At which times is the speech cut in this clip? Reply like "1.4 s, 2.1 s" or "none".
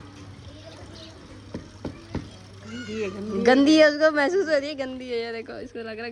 none